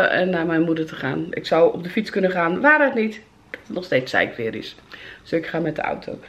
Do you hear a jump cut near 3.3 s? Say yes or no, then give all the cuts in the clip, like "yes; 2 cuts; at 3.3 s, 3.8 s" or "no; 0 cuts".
no; 0 cuts